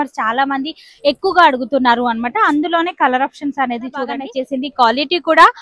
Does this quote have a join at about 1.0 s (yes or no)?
no